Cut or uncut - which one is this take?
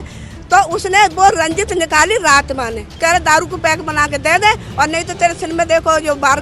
cut